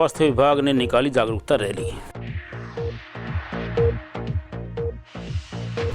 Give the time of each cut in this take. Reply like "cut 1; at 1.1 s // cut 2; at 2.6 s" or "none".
none